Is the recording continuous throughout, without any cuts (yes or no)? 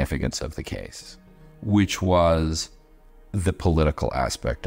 yes